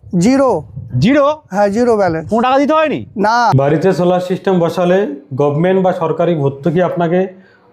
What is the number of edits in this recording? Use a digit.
1